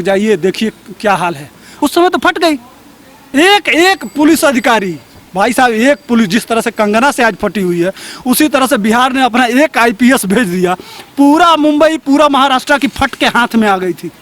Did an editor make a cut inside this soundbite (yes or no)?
yes